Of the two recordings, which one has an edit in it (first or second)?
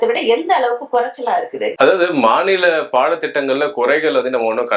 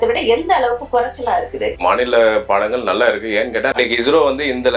second